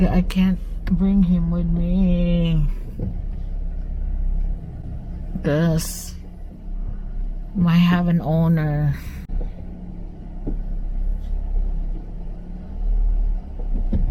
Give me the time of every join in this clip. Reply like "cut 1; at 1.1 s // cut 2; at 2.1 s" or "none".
none